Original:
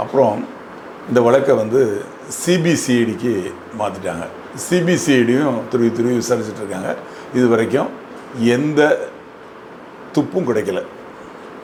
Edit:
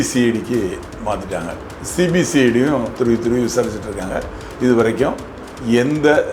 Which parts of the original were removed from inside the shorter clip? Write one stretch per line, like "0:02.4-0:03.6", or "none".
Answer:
none